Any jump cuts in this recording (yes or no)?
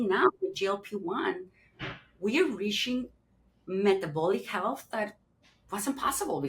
no